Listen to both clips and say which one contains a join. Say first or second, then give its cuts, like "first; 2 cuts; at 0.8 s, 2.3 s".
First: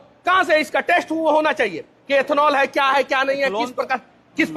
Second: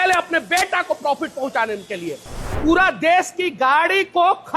second; 1 cut; at 2.5 s